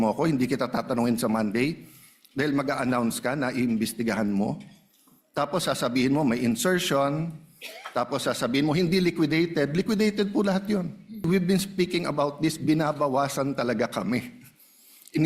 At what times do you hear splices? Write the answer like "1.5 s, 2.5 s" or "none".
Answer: 11.3 s